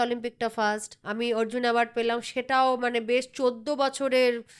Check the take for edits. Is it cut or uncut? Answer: cut